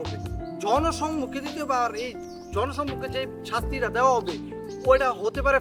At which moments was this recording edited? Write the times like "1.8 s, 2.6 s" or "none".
none